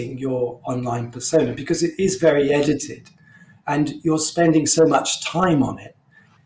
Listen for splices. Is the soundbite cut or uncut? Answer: uncut